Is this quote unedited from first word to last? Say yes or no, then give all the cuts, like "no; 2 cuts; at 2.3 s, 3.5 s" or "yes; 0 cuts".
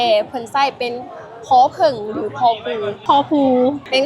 yes; 0 cuts